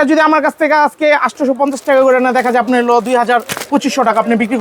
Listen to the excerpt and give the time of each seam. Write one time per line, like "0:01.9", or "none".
none